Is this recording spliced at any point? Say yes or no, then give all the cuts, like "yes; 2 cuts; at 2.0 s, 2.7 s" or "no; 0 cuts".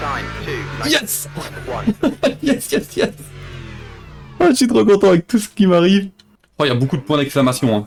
no; 0 cuts